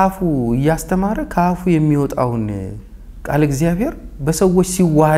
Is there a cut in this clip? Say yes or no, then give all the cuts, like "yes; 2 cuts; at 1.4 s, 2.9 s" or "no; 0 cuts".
no; 0 cuts